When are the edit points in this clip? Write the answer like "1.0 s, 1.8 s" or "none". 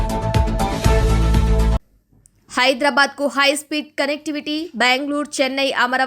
1.8 s